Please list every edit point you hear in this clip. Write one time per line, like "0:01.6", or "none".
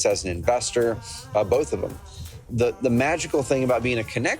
0:02.4